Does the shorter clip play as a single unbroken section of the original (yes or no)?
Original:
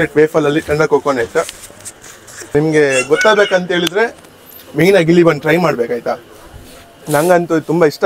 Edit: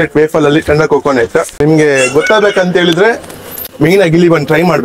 no